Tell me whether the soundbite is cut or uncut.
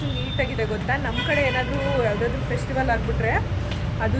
uncut